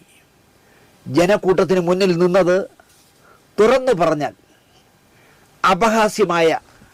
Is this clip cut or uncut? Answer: uncut